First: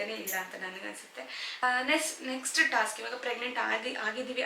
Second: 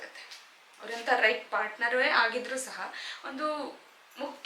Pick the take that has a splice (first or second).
first